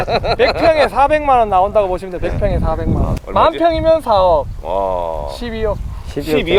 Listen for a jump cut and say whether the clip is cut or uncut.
uncut